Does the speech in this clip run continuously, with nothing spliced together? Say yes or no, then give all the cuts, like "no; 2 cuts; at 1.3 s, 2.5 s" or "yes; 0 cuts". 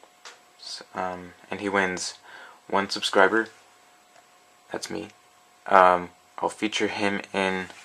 yes; 0 cuts